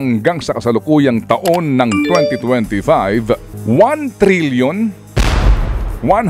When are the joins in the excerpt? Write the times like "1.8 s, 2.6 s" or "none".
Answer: 3.5 s